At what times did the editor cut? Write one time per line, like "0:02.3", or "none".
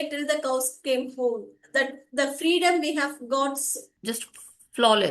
0:03.9

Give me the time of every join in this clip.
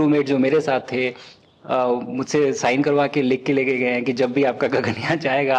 none

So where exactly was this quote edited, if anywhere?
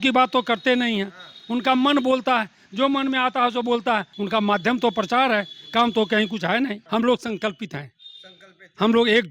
0:04.1
0:06.8

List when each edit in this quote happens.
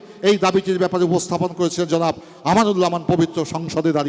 none

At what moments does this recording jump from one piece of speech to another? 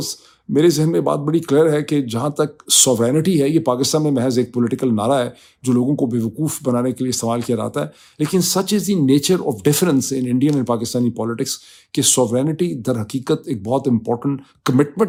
none

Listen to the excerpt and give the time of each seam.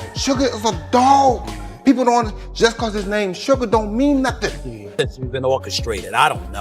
0:04.8

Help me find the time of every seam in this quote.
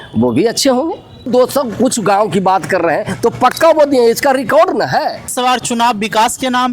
0:01.3
0:05.3

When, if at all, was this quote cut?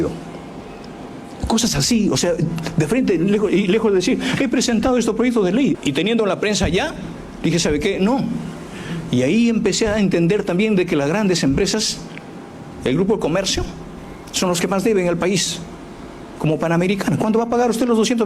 0:05.7

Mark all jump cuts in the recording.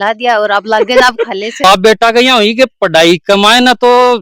0:01.6

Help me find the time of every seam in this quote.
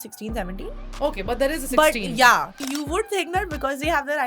0:02.5

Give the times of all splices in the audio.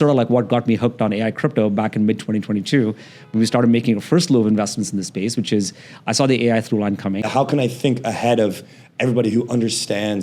0:07.3

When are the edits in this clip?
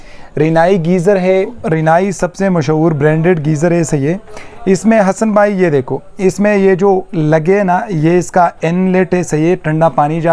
0:01.6

